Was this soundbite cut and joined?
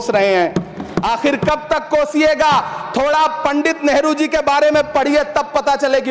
no; 0 cuts

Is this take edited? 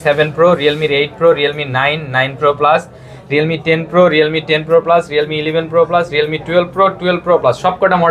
no; 0 cuts

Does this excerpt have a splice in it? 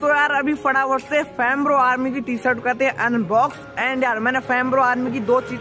no; 0 cuts

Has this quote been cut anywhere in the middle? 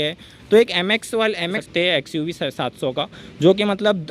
yes; 1 cut; at 1.6 s

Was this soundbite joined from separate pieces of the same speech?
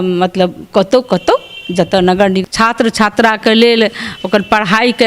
yes; 1 cut; at 2.4 s

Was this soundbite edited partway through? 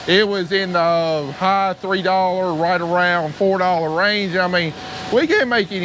no; 0 cuts

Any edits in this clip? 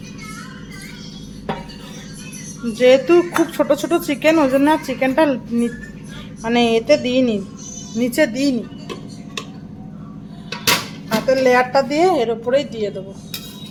no; 0 cuts

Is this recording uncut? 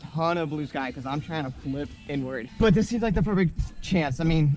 no; 1 cut; at 2.4 s

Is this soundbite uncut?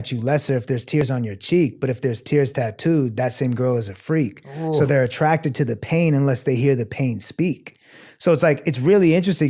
yes; 0 cuts

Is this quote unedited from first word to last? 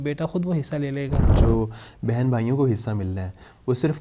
no; 1 cut; at 1.3 s

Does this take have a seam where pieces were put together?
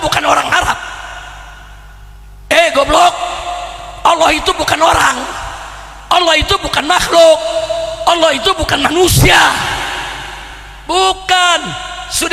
no; 0 cuts

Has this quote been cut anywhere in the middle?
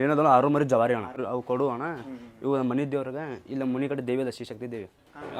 yes; 1 cut; at 1.2 s

